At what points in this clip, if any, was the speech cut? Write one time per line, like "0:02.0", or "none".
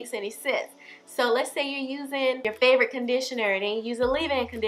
0:02.5

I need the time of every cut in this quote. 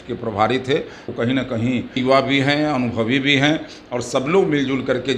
0:01.1
0:02.0

